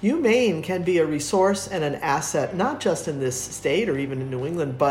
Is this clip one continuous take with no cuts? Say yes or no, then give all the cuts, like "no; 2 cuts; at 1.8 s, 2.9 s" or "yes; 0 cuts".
yes; 0 cuts